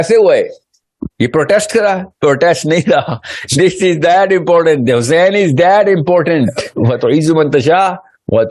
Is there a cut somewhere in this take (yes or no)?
yes